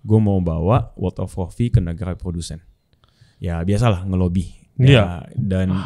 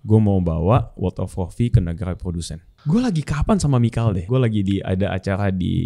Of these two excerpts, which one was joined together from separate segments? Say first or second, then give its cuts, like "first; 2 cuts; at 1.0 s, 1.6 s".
second; 2 cuts; at 2.7 s, 4.2 s